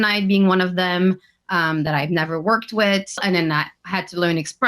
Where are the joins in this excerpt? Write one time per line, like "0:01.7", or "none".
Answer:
0:03.2

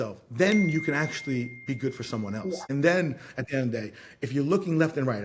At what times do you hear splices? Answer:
0:02.5

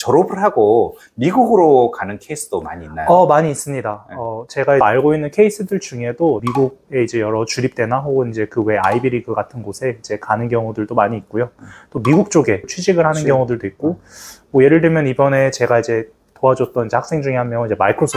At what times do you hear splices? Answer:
0:04.8
0:06.5
0:12.7

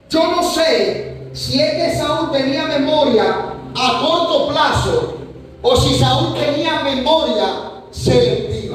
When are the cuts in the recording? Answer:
none

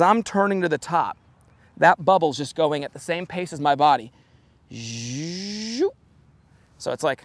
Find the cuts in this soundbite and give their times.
none

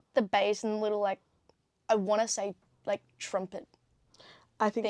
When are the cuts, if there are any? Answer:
none

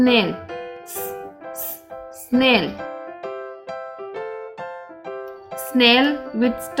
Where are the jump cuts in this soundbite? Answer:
0:02.7
0:05.7

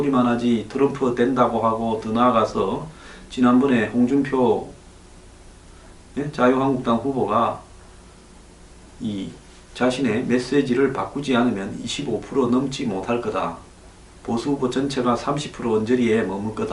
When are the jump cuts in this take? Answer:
0:02.5

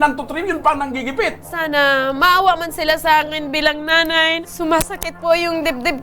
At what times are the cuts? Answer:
0:01.4
0:04.4

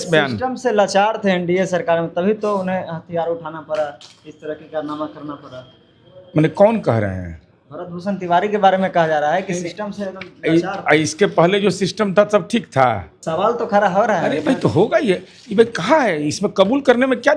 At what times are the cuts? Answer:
0:13.1

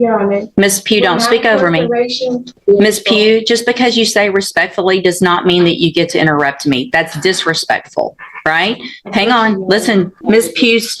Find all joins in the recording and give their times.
0:02.6
0:10.2

